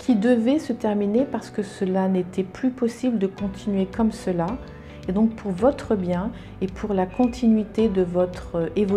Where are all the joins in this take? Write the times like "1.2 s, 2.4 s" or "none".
none